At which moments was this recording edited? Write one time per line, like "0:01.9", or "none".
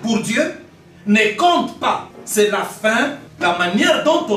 0:02.1
0:03.3